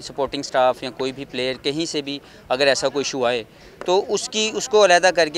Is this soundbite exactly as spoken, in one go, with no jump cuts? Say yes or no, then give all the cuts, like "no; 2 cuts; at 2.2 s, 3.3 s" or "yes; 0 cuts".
yes; 0 cuts